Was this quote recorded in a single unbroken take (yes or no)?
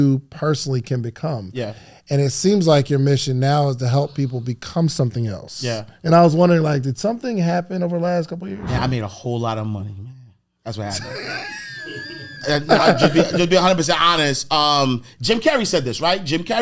yes